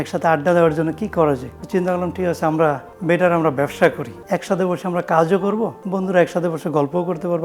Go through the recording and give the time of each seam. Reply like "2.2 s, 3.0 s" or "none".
1.5 s, 2.9 s, 4.1 s, 5.8 s